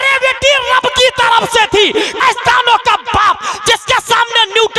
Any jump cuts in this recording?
yes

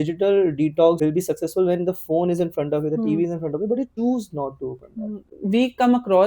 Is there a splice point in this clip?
yes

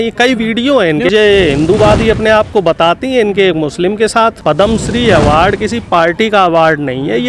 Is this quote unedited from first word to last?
no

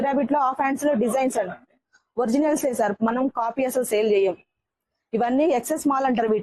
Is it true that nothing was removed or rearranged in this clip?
yes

